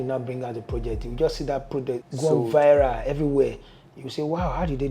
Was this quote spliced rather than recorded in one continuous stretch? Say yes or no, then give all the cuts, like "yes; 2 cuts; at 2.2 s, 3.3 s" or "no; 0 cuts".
yes; 1 cut; at 2.0 s